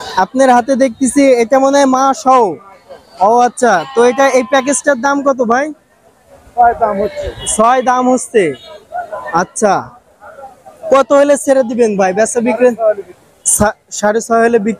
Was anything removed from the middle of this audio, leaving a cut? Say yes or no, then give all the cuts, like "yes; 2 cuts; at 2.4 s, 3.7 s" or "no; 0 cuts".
no; 0 cuts